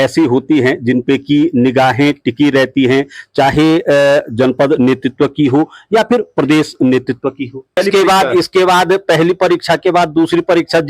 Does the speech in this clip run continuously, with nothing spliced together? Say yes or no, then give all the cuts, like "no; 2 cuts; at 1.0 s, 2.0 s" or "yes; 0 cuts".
no; 1 cut; at 7.8 s